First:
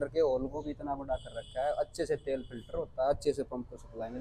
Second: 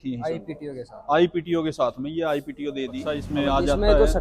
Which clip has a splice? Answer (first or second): second